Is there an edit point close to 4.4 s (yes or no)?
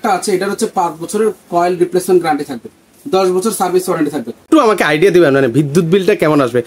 yes